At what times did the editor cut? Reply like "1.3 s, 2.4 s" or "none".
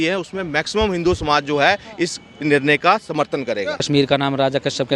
3.8 s